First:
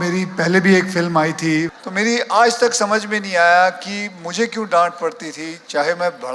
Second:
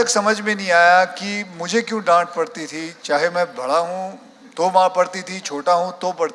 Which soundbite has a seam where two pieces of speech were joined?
first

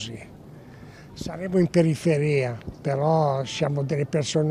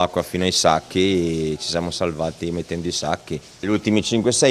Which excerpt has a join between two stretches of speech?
second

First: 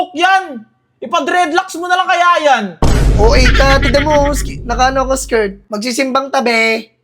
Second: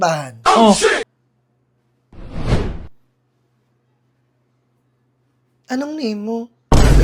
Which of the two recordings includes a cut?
first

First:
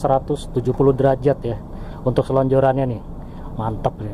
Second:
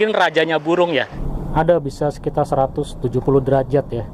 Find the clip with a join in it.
second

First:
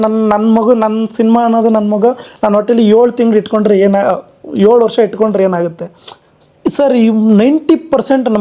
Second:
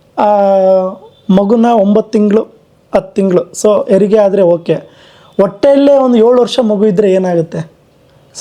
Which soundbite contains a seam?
first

